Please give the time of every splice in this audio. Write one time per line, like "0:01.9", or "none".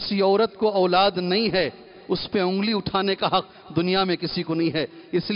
none